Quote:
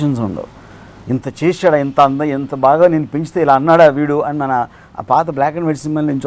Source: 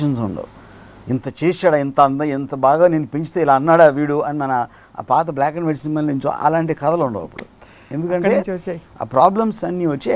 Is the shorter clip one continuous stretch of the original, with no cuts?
yes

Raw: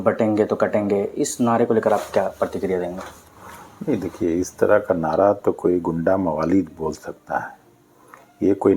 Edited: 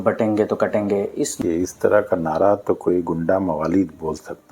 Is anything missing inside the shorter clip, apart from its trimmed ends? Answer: yes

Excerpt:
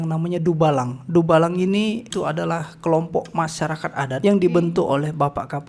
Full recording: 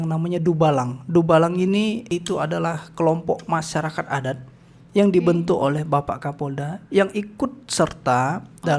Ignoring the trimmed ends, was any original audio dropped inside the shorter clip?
yes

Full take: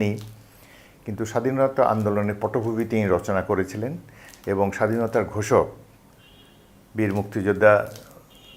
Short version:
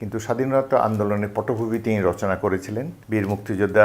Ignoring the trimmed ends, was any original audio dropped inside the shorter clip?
yes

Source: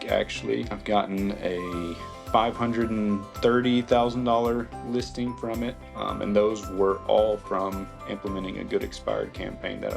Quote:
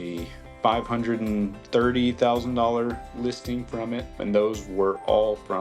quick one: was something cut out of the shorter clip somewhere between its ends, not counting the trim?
yes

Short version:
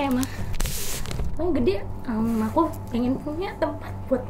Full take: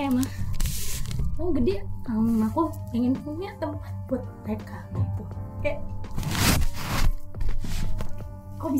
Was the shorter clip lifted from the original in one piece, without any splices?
yes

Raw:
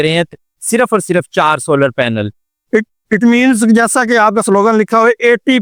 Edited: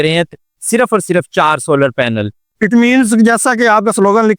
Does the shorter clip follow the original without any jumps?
no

